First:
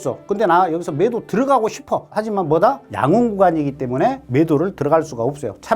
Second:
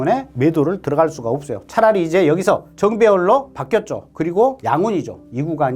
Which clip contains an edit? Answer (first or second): first